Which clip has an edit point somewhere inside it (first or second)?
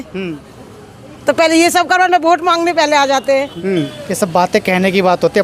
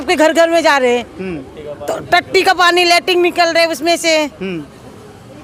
first